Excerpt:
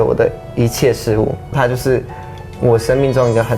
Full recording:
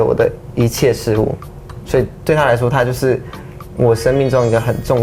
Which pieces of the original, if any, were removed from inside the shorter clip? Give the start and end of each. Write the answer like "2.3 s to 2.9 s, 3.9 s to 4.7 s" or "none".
1.5 s to 2.7 s